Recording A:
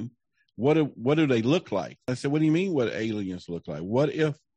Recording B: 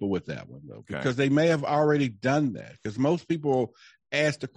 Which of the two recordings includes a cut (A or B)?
A